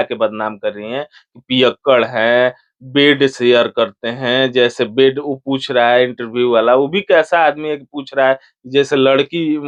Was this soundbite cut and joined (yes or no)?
no